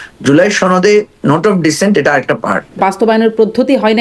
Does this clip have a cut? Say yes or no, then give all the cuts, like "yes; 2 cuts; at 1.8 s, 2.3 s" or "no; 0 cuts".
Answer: yes; 1 cut; at 2.8 s